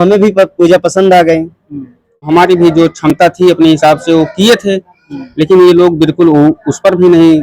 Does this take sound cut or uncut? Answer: cut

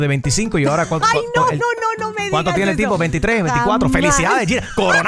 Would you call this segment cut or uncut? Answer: uncut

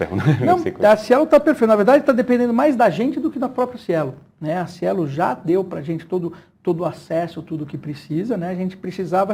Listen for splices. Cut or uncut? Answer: uncut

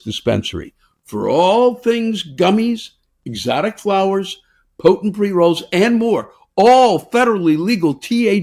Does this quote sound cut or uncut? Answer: uncut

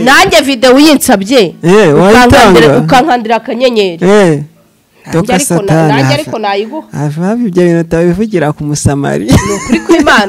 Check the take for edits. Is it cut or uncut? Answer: uncut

